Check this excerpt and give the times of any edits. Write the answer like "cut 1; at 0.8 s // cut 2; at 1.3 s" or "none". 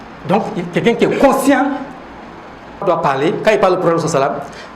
cut 1; at 2.8 s